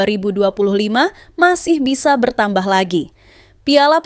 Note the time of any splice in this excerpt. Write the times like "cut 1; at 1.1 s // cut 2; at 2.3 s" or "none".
none